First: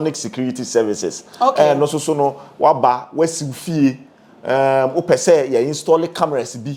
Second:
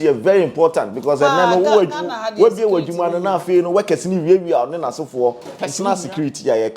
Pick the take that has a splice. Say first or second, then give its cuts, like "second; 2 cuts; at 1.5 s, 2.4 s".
second; 1 cut; at 5.6 s